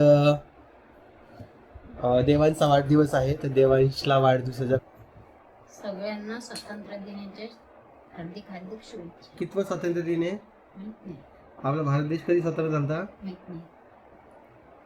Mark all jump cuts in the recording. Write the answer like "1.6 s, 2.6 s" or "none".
4.9 s